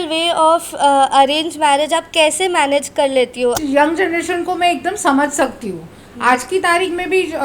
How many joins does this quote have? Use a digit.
1